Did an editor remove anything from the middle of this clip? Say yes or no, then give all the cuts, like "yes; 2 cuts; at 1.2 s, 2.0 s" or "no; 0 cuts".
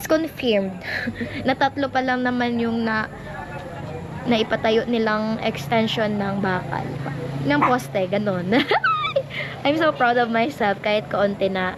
no; 0 cuts